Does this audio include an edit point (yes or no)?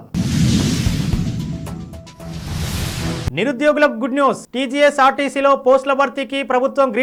no